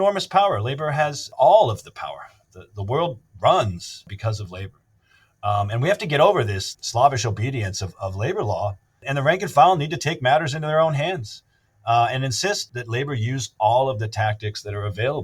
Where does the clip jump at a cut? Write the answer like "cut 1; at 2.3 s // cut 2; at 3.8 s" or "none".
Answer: cut 1; at 4.1 s // cut 2; at 9.0 s